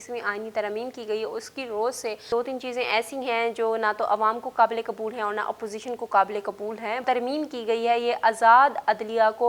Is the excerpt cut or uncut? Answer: cut